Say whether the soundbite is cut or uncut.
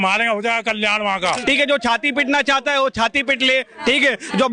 cut